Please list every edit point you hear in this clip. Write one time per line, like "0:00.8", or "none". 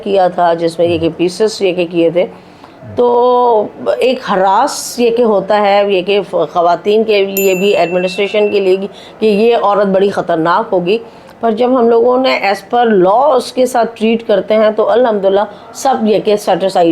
none